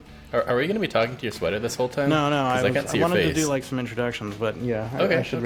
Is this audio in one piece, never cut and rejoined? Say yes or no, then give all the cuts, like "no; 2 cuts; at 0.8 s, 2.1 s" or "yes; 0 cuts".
yes; 0 cuts